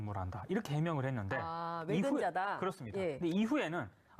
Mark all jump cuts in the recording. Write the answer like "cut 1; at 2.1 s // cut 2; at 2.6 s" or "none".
cut 1; at 3.1 s